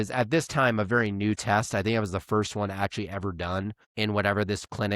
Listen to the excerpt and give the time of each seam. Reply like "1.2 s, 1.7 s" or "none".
3.8 s